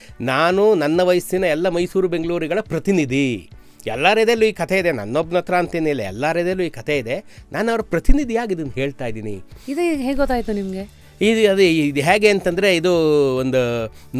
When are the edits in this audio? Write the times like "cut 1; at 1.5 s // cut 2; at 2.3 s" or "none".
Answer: cut 1; at 9.6 s